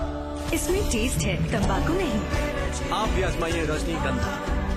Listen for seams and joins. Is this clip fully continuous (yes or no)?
yes